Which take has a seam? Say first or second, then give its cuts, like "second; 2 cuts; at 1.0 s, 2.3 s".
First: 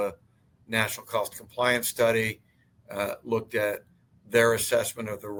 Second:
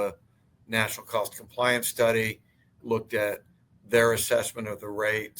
second; 1 cut; at 2.8 s